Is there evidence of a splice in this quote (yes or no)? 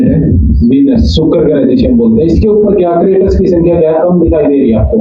no